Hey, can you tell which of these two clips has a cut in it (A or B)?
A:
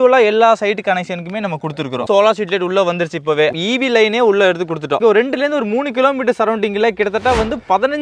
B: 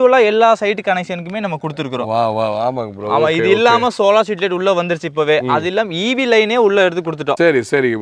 A